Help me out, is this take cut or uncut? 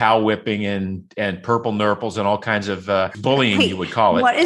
cut